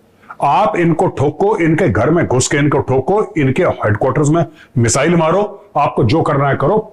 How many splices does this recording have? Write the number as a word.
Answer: zero